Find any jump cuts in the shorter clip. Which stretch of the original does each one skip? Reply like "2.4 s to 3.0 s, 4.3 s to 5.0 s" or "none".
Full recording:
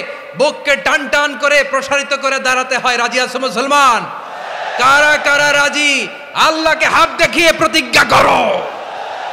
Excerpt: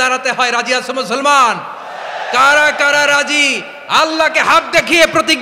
none